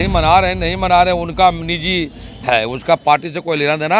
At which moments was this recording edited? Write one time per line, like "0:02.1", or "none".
none